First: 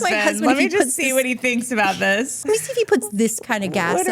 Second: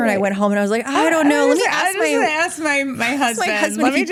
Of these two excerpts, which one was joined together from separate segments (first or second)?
first